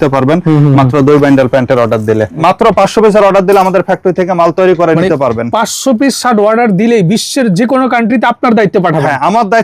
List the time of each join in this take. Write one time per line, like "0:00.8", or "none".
0:02.3